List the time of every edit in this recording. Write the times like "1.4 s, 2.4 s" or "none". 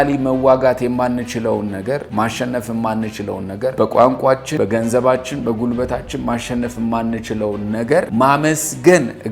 2.1 s, 3.7 s, 4.5 s, 8.1 s

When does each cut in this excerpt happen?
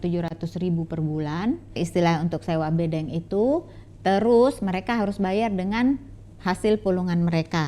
1.8 s

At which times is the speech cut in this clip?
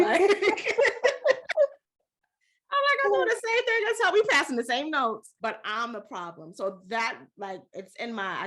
5.3 s

